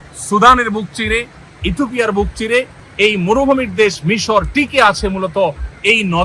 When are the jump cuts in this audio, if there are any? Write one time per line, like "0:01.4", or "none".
0:02.8